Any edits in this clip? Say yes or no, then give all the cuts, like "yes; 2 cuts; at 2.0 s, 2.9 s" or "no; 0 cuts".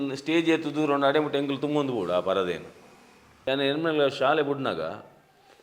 yes; 1 cut; at 3.3 s